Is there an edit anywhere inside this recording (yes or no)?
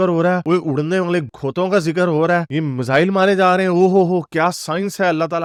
no